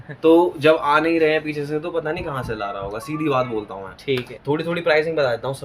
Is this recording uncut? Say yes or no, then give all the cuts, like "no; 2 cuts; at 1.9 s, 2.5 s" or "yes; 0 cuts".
no; 1 cut; at 4.3 s